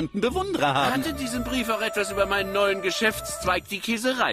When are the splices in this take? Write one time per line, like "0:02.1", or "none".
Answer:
0:01.3